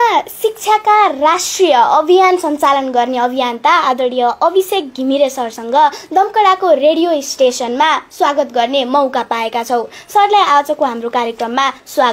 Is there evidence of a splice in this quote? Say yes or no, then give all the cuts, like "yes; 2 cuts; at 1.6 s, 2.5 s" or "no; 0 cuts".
no; 0 cuts